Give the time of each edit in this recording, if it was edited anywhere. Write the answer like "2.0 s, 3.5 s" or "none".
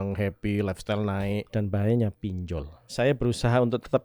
1.5 s, 2.8 s